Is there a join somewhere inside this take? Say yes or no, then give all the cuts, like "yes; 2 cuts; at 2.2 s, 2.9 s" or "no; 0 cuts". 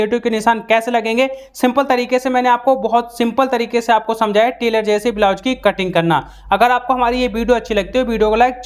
no; 0 cuts